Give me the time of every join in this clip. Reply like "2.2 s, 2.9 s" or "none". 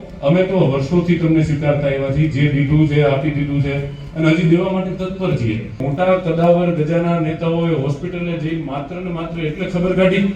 5.8 s